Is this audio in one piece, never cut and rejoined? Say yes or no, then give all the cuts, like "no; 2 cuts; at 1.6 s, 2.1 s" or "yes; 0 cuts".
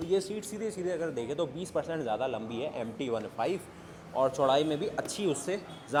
yes; 0 cuts